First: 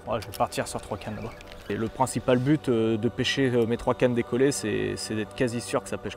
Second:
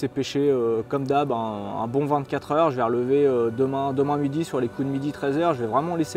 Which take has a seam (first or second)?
first